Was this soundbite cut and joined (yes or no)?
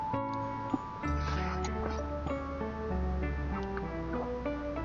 no